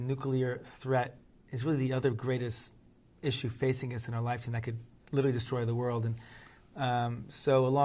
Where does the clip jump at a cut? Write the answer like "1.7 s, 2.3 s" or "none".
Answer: none

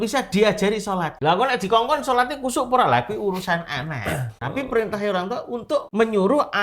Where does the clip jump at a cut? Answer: 1.1 s

